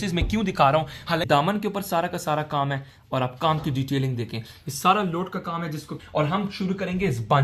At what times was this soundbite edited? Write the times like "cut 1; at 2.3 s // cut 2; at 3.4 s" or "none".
cut 1; at 1.2 s // cut 2; at 6.0 s